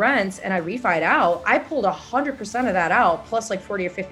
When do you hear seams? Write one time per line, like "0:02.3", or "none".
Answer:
none